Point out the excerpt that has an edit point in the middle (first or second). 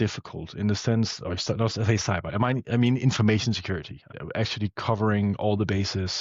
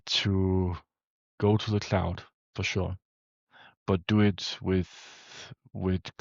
first